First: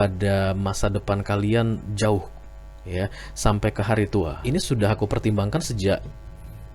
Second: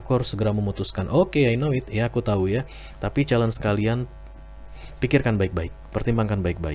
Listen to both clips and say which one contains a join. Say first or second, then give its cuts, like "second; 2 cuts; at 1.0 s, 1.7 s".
first; 1 cut; at 4.4 s